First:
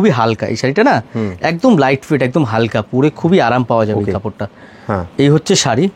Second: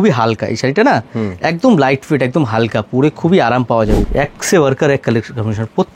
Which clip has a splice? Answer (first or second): second